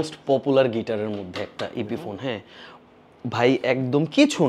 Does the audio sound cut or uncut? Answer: uncut